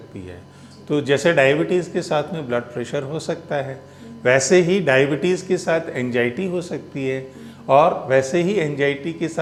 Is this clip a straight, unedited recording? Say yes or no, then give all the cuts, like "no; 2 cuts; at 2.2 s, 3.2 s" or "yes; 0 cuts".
yes; 0 cuts